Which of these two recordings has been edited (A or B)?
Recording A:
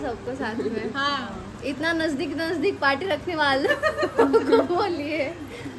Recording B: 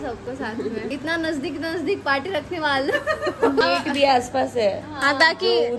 B